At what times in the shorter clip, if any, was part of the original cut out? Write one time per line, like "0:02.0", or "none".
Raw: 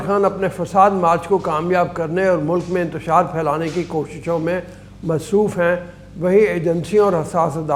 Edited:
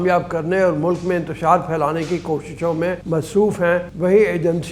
0:03.0
0:03.9